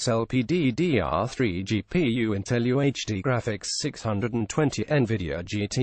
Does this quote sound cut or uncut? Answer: cut